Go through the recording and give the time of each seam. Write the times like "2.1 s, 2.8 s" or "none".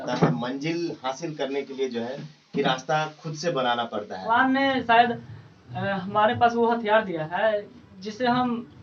4.3 s